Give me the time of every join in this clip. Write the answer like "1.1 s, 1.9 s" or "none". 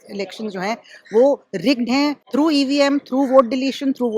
2.2 s